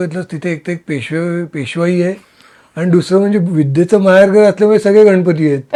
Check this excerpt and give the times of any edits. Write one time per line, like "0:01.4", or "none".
none